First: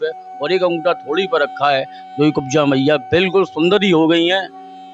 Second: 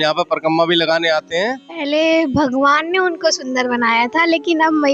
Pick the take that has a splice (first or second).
second